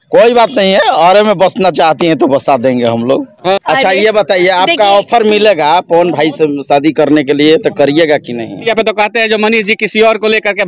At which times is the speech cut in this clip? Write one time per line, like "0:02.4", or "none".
0:03.6
0:08.6